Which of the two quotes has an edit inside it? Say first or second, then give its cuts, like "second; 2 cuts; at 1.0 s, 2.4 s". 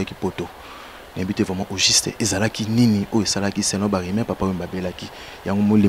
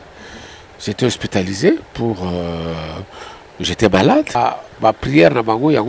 second; 1 cut; at 4.4 s